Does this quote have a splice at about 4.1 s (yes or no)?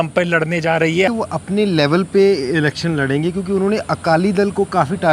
no